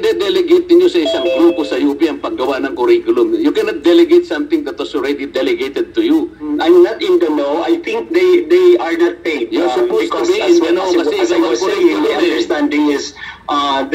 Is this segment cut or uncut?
cut